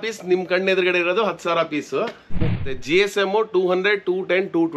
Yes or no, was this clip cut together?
yes